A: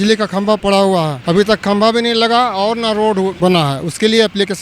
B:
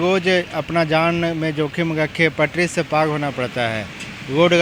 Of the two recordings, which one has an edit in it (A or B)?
A